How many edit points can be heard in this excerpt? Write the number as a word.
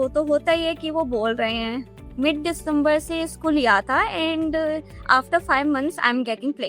one